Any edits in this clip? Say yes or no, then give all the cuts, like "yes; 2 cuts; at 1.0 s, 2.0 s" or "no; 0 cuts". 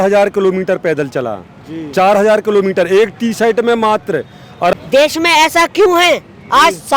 yes; 1 cut; at 4.7 s